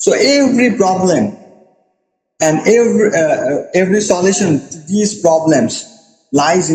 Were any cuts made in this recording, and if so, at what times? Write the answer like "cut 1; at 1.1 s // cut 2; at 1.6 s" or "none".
none